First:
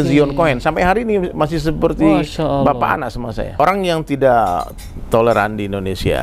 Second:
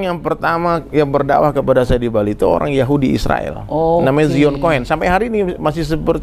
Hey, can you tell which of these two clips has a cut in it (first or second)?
first